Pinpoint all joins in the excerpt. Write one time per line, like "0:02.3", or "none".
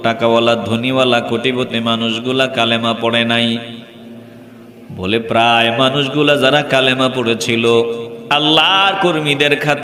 none